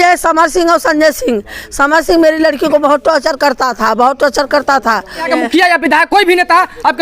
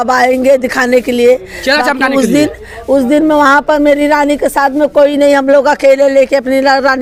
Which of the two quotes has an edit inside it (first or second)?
first